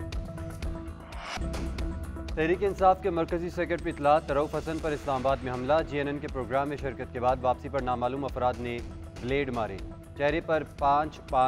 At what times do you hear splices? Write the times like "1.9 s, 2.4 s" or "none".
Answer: 1.3 s